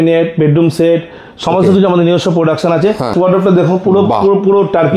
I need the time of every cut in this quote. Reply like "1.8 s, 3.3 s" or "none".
3.1 s